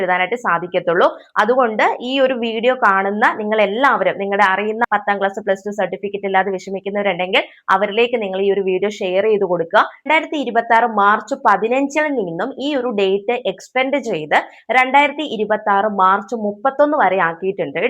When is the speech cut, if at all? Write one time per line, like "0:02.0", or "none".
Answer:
0:04.9
0:10.1